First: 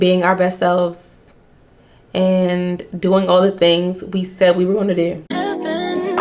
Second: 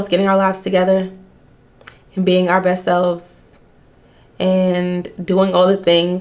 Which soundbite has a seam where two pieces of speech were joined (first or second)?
first